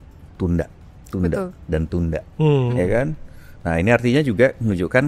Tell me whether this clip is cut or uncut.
uncut